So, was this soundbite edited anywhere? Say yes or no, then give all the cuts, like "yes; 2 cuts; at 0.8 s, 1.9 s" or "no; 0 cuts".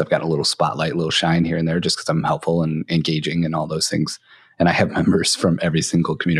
no; 0 cuts